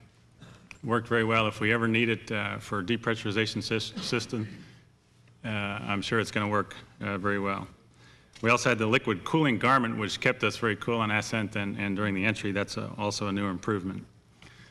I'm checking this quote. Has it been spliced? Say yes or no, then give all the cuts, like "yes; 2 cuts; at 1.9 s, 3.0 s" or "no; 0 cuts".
no; 0 cuts